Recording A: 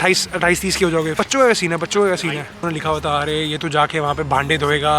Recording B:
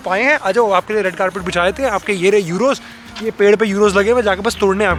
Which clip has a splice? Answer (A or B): A